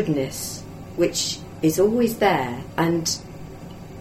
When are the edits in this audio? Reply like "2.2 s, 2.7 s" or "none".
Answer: 2.6 s